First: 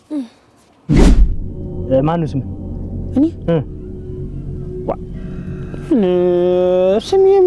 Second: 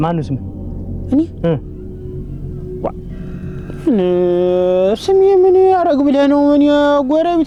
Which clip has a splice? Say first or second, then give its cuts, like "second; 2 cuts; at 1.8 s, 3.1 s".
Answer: first; 1 cut; at 1.0 s